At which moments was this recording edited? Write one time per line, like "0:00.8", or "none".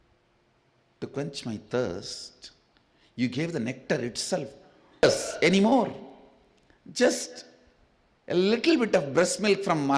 0:05.0